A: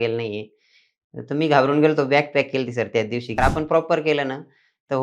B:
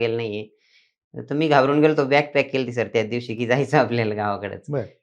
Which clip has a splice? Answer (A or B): A